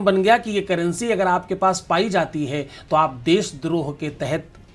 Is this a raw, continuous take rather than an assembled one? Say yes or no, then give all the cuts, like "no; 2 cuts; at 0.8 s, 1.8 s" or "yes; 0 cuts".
yes; 0 cuts